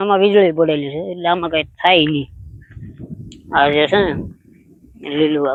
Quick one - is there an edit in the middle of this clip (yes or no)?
no